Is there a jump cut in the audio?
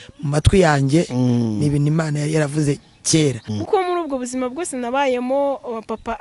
yes; 1 cut; at 3.4 s

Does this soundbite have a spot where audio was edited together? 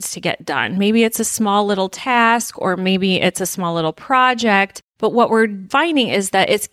yes; 1 cut; at 4.8 s

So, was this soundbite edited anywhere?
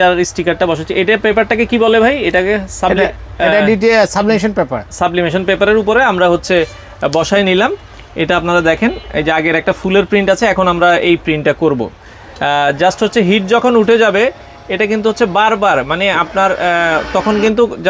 no; 0 cuts

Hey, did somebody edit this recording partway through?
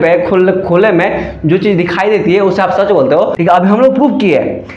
yes; 1 cut; at 3.3 s

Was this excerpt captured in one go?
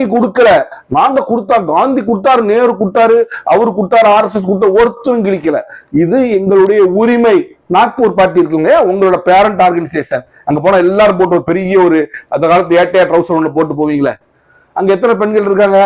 no; 1 cut; at 7.6 s

